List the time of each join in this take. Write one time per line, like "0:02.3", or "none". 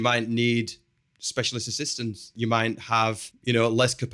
0:02.3
0:03.3

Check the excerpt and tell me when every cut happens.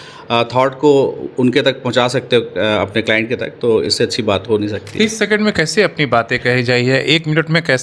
none

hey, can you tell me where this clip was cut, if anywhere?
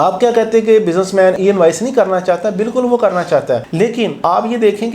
0:01.4

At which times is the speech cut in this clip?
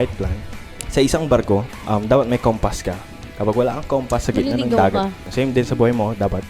0:01.7
0:05.2

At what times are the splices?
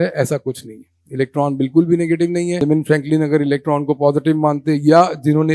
0:02.6

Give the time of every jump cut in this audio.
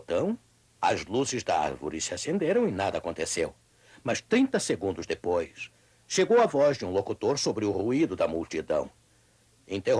0:03.6

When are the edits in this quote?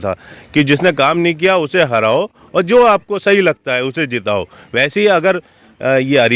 none

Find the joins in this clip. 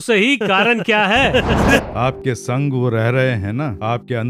0:01.8

